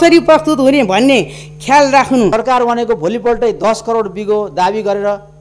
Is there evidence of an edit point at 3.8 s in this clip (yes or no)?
no